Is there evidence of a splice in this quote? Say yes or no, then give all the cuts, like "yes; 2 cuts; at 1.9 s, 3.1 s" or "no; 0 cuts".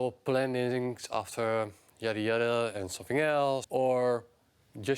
yes; 1 cut; at 3.7 s